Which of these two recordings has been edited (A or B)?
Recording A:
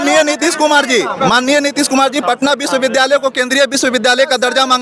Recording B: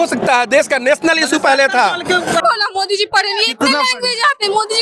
B